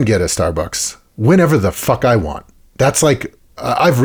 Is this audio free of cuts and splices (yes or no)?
yes